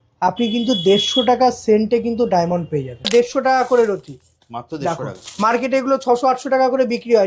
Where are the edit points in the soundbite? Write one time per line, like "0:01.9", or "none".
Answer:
0:03.1